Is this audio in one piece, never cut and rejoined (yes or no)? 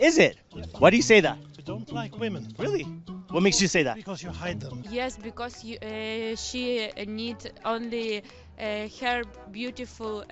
no